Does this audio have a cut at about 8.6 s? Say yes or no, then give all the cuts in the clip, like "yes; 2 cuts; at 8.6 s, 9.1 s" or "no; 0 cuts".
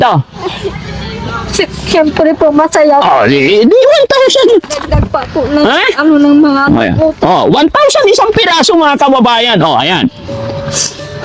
no; 0 cuts